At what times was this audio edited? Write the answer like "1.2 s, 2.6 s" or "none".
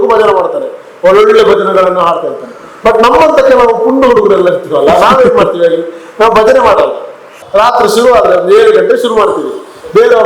7.4 s